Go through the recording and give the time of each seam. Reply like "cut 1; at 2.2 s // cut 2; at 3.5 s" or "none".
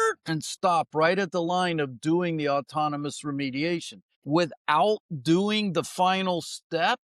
cut 1; at 4.1 s